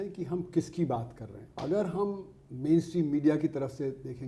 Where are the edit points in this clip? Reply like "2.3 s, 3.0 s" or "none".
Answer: 1.4 s